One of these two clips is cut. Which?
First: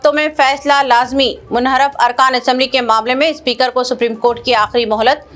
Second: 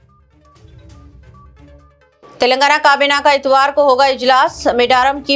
second; 1 cut; at 0.9 s

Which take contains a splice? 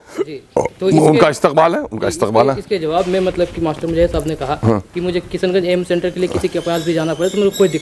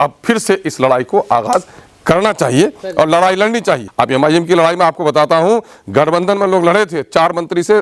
second; 1 cut; at 3.9 s

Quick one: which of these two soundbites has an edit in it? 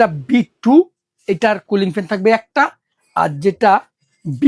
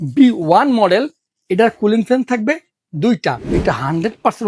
second; 1 cut; at 3.5 s

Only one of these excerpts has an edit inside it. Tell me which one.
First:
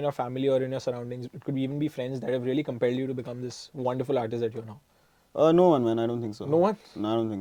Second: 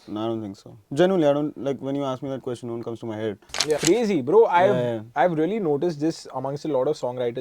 second; 1 cut; at 3.8 s

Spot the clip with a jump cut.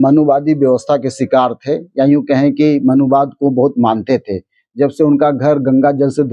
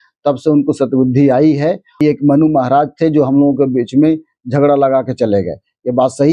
second; 1 cut; at 1.9 s

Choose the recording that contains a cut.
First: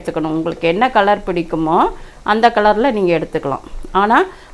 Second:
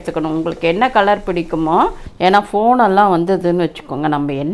second; 1 cut; at 2.0 s

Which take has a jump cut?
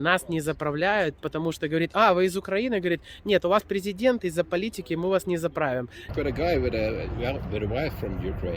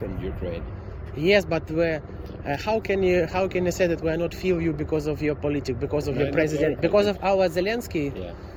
first; 1 cut; at 6.0 s

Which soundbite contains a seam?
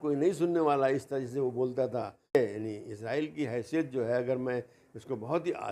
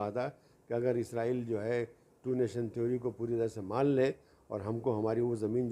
first; 1 cut; at 2.4 s

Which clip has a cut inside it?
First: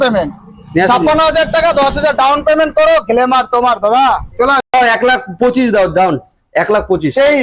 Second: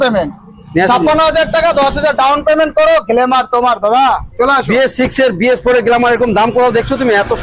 first; 1 cut; at 4.7 s

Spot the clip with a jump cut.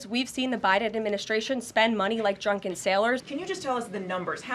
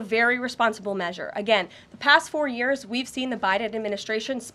first; 1 cut; at 3.3 s

